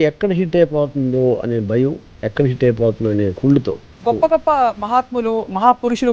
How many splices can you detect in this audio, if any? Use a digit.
1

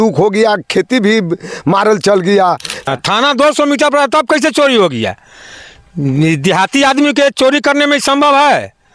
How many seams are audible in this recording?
1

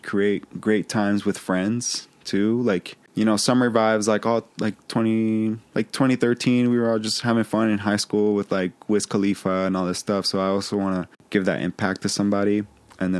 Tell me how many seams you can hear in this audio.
2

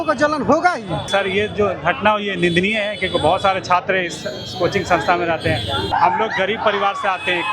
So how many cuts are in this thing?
2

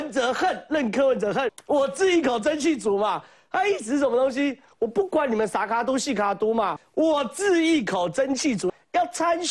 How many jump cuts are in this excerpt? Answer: 3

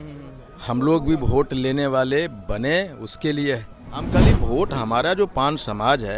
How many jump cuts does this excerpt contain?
1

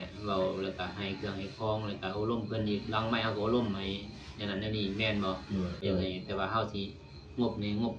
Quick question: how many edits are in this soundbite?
1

